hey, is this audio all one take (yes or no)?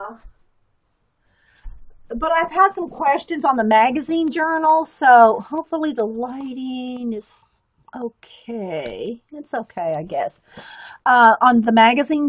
yes